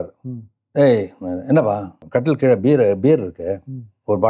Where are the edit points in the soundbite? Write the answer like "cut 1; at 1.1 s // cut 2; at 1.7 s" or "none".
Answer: cut 1; at 1.9 s